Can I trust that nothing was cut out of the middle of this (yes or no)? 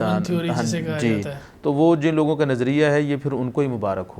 yes